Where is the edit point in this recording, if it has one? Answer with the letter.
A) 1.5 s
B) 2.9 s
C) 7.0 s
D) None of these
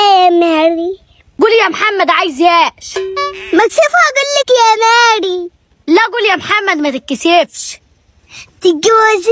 D